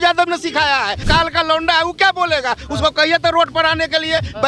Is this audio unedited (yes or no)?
no